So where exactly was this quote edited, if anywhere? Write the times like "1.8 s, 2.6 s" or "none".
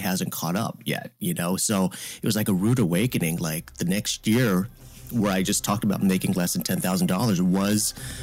none